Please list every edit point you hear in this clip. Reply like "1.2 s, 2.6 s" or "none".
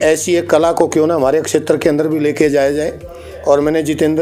none